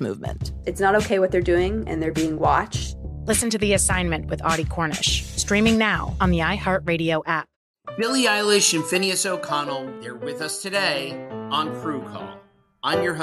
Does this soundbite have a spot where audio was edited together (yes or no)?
yes